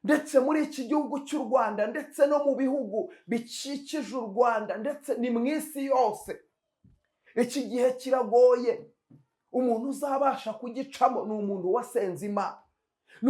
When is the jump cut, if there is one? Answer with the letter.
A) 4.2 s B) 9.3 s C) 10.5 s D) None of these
D